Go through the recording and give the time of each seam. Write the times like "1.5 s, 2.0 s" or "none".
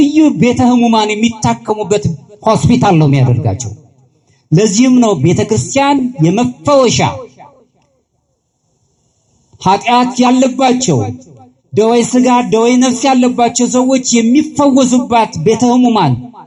none